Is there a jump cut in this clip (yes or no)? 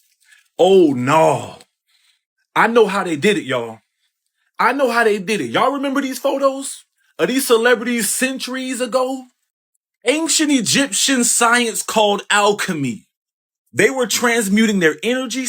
no